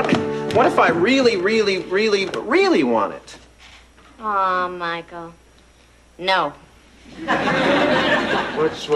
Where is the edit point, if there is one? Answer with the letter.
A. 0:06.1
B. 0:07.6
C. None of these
C